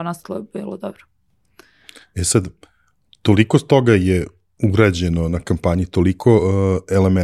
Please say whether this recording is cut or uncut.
uncut